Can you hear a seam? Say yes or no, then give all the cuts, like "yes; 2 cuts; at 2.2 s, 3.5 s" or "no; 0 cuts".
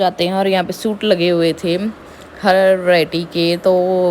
no; 0 cuts